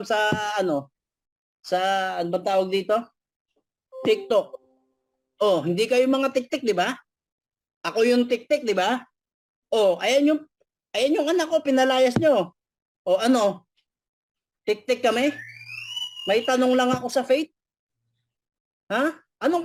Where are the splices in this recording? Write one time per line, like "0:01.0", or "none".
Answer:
none

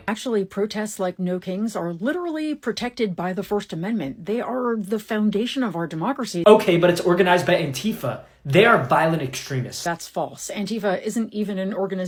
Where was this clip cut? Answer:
none

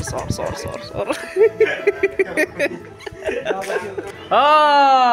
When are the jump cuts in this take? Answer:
0:04.1

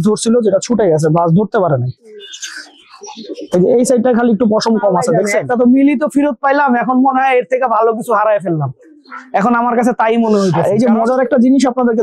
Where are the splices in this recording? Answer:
0:05.2
0:10.6

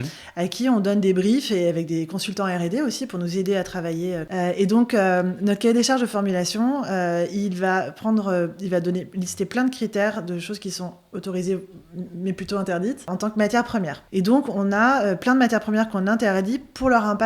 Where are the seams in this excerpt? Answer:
0:04.3
0:13.1
0:14.0

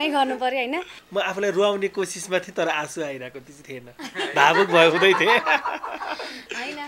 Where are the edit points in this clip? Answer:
0:01.0

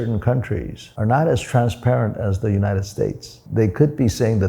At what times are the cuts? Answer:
0:03.4

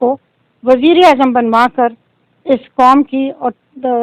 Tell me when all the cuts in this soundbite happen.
none

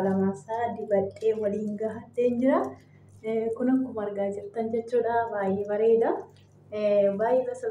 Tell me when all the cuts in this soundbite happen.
none

